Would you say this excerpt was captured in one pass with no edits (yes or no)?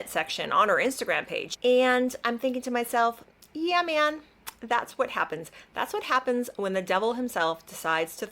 no